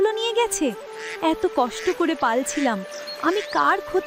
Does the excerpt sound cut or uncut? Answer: uncut